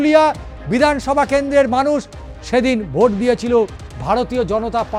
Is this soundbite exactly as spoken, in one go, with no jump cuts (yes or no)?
yes